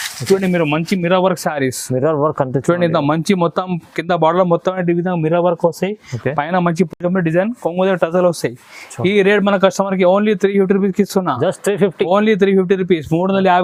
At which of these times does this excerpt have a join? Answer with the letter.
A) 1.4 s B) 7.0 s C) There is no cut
C